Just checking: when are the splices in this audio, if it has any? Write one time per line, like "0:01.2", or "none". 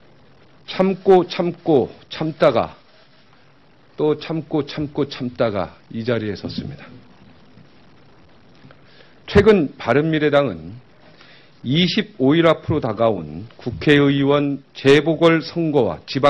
0:10.2